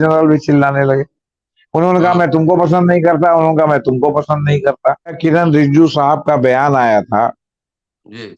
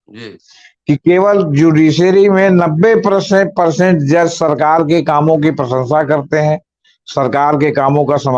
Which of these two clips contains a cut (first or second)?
first